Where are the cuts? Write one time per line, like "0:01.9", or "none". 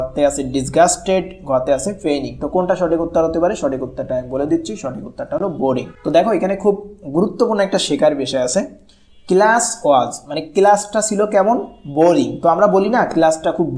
0:05.9